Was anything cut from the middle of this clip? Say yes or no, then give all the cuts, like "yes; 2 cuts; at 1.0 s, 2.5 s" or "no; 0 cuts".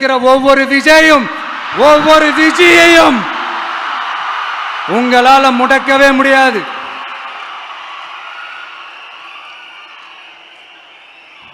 no; 0 cuts